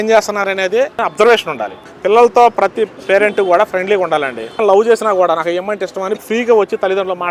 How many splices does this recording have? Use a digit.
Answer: 3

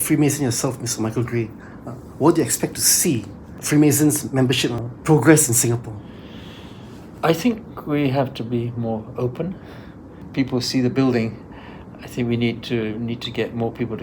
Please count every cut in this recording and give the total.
3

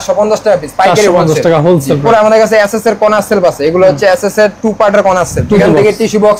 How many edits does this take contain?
2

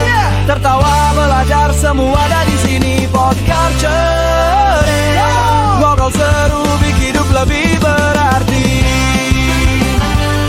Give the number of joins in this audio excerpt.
0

